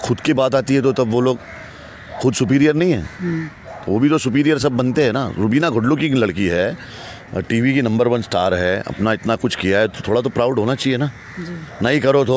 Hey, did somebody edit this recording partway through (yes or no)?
no